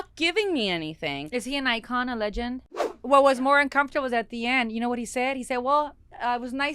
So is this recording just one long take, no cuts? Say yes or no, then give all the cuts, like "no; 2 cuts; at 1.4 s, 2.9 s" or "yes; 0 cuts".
no; 1 cut; at 2.9 s